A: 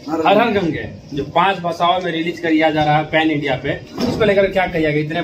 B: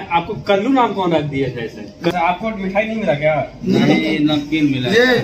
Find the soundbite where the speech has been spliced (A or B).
B